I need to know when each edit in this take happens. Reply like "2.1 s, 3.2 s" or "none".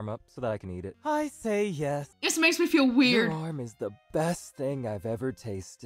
0.9 s, 2.2 s